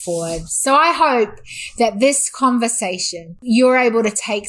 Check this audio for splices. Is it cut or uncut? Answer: cut